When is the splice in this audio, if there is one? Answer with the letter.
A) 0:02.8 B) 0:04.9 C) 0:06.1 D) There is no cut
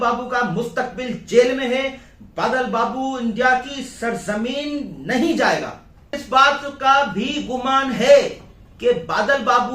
C